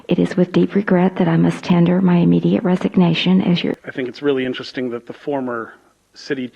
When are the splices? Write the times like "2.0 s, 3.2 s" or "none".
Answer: 3.7 s